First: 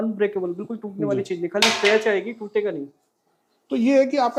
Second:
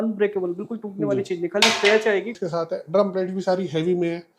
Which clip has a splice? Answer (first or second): second